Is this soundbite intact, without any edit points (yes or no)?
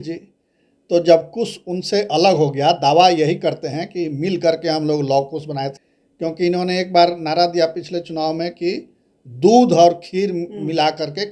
no